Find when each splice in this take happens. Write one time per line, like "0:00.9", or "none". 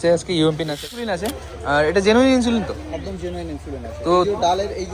0:01.1